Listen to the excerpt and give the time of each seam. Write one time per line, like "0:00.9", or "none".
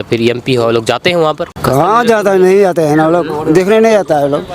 0:01.5